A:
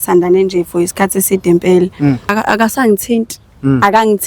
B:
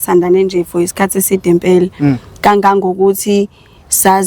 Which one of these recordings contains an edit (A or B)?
A